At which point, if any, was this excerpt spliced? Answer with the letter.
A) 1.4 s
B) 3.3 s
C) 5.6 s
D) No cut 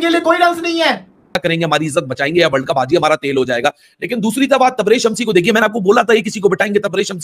A